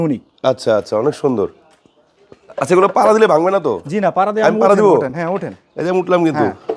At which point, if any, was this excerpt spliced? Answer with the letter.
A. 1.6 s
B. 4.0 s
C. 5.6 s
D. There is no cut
D